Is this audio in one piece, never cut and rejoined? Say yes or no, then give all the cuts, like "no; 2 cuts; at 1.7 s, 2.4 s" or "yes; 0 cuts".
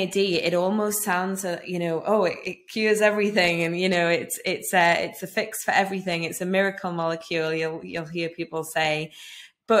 yes; 0 cuts